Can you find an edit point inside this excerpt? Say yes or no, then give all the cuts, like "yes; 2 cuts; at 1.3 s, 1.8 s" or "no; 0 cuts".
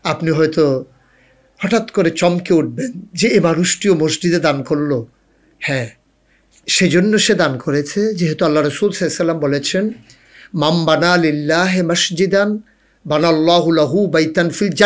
no; 0 cuts